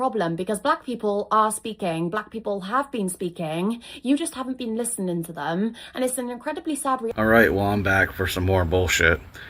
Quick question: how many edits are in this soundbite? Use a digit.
1